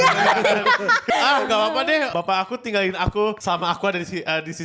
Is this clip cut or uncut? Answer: cut